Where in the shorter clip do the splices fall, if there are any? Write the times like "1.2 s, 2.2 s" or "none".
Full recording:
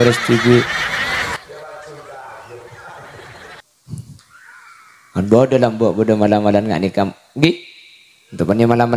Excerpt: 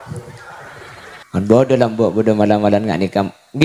1.2 s